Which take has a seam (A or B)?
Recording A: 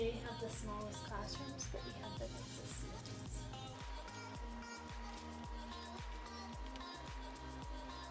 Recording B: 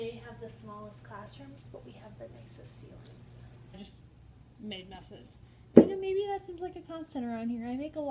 B